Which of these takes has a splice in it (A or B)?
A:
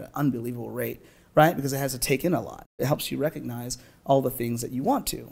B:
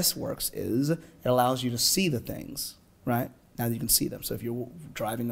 A